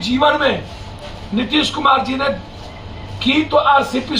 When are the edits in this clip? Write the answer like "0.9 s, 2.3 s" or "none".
none